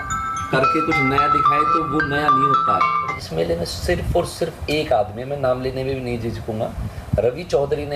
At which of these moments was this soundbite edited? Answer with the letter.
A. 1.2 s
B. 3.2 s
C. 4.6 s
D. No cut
B